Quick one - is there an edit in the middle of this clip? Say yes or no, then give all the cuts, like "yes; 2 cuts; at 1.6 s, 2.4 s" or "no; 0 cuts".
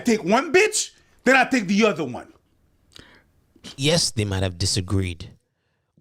yes; 1 cut; at 3.7 s